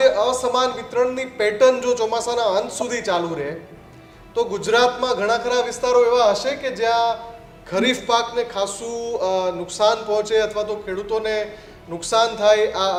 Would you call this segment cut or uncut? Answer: uncut